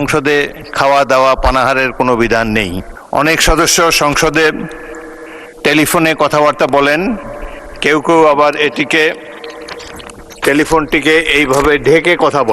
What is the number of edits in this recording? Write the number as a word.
one